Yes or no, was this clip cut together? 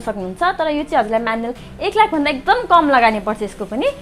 no